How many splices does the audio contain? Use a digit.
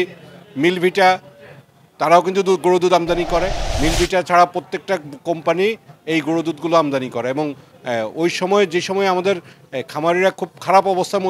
1